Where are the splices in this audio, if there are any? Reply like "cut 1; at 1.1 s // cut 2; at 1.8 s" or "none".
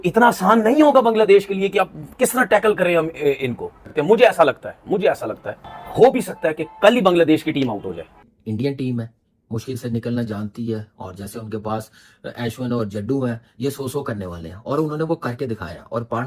cut 1; at 8.1 s